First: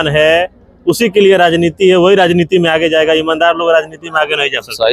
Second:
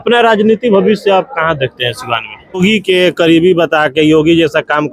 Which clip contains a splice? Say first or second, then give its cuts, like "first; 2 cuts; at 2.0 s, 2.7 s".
second; 1 cut; at 2.6 s